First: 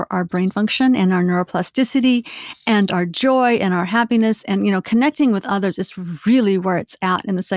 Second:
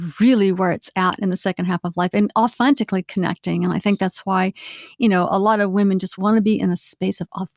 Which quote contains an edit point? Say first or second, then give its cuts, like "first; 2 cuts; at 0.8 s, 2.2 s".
second; 2 cuts; at 2.5 s, 6.2 s